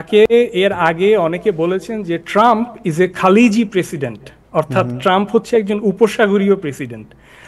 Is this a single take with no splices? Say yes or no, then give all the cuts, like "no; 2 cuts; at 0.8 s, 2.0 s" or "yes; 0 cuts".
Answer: yes; 0 cuts